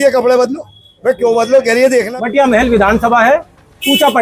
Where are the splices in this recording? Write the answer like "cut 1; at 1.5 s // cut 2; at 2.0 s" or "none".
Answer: cut 1; at 2.2 s